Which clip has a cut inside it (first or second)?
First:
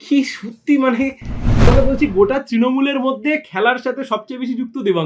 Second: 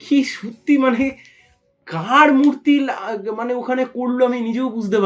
first